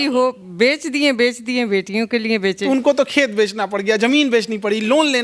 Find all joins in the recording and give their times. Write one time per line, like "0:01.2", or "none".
0:02.6